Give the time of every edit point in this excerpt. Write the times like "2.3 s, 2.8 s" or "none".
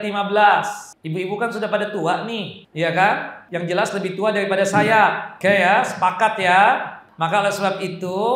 0.9 s, 2.6 s, 3.4 s, 5.3 s, 7.0 s